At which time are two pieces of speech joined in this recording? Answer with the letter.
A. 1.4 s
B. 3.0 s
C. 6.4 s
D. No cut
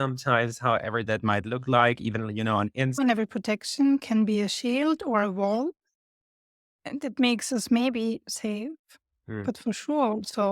B